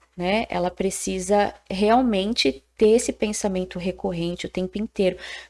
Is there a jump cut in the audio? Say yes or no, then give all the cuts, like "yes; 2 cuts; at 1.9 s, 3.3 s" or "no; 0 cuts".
no; 0 cuts